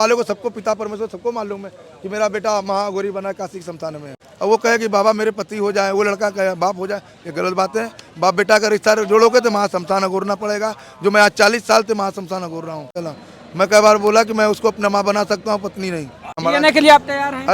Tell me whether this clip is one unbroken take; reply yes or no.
no